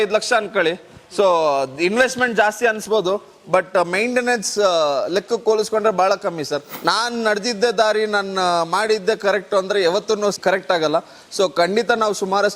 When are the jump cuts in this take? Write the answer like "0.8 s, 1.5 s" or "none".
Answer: 6.7 s, 10.4 s